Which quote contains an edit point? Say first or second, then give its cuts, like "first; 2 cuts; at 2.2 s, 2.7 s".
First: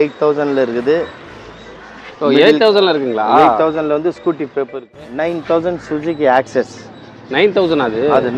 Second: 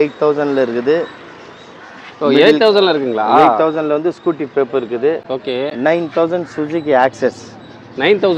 first; 1 cut; at 4.8 s